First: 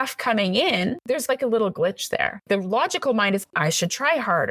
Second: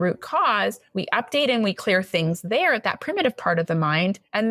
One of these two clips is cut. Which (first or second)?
first